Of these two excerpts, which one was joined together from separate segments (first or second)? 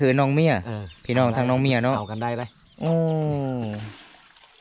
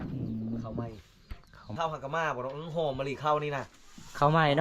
second